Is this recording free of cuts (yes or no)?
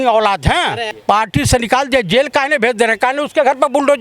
no